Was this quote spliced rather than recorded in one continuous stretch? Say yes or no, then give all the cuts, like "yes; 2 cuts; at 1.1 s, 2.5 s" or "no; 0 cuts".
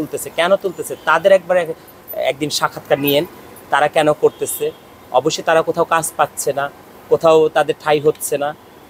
no; 0 cuts